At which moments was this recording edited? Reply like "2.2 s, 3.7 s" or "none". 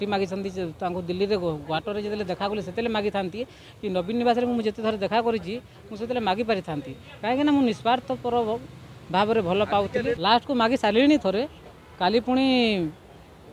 10.2 s